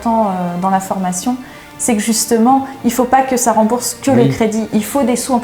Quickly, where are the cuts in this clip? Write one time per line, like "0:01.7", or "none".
none

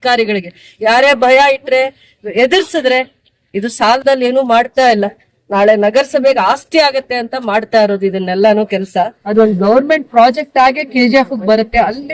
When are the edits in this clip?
0:09.2

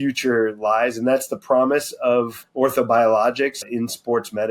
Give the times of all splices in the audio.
0:02.4
0:03.6

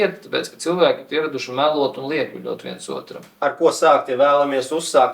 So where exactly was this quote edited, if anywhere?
0:03.4

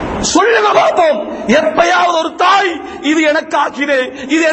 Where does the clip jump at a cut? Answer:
none

